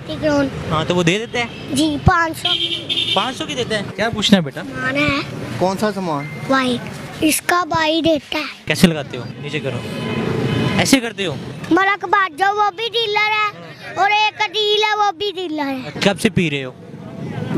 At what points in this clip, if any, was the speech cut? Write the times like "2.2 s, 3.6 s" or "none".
3.9 s, 7.0 s, 8.6 s, 11.5 s